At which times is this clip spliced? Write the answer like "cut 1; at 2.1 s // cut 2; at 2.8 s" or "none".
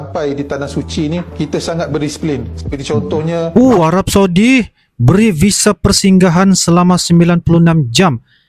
cut 1; at 3.5 s